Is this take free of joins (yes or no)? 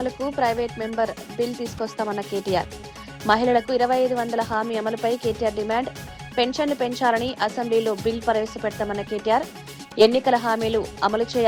yes